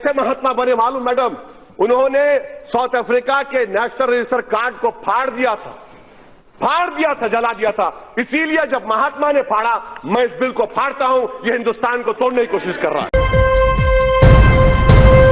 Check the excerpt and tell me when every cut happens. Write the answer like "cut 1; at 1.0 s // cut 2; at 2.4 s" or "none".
cut 1; at 13.1 s